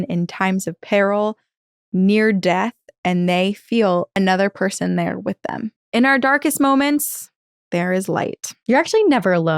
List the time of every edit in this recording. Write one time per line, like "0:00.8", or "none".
0:04.1
0:05.7
0:08.5